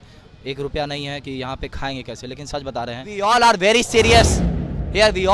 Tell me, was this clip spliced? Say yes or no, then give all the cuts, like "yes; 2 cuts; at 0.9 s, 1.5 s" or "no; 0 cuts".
yes; 1 cut; at 3.1 s